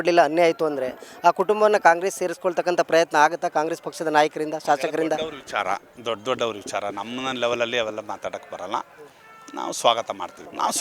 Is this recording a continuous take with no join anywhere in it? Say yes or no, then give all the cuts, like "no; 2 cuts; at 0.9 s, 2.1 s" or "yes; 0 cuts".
yes; 0 cuts